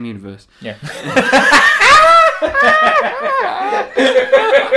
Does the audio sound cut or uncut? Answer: uncut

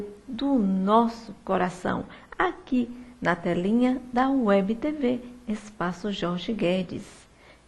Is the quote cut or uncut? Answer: uncut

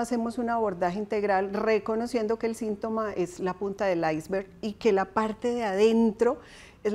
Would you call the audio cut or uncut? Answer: uncut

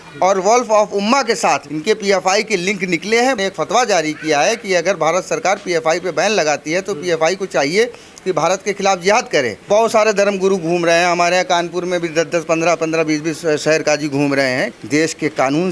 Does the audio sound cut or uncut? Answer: cut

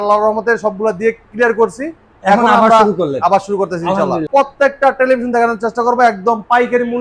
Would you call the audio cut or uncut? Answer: cut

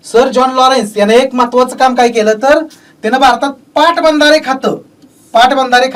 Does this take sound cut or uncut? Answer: uncut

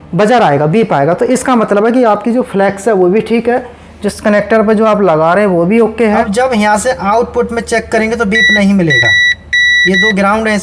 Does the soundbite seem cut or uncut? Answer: cut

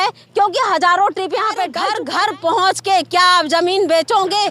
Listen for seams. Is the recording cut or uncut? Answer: cut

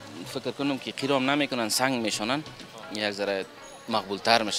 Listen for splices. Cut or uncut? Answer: uncut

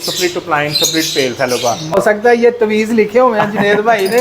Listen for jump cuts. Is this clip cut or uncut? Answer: cut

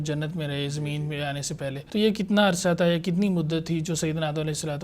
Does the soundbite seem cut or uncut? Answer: cut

